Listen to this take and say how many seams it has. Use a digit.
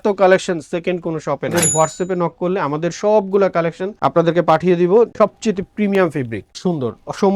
3